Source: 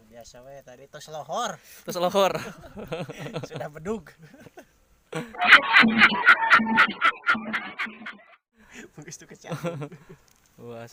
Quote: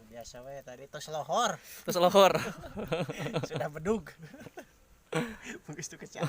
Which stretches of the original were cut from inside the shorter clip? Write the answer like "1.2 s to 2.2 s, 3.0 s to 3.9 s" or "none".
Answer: 5.3 s to 8.6 s